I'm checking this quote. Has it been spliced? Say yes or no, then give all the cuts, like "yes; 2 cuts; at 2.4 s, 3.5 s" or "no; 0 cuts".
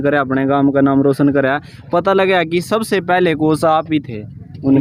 no; 0 cuts